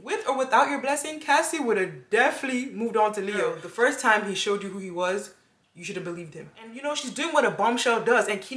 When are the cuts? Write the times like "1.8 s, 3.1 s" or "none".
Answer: 3.6 s, 6.7 s